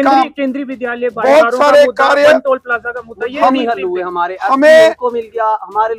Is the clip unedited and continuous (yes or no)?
yes